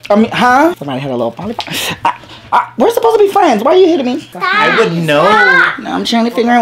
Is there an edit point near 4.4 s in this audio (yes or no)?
yes